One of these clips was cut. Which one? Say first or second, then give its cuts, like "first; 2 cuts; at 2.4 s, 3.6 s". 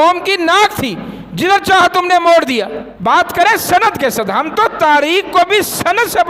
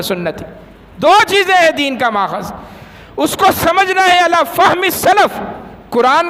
first; 1 cut; at 2.8 s